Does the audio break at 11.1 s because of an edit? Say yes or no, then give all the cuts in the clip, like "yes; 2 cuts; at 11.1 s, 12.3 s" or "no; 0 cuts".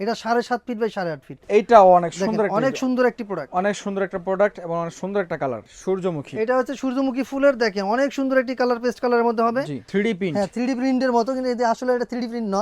no; 3 cuts; at 1.4 s, 5.7 s, 9.8 s